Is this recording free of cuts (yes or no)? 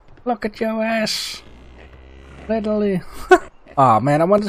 no